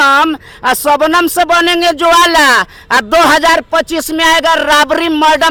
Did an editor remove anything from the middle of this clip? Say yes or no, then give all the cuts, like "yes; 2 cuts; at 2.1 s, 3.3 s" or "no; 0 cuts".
no; 0 cuts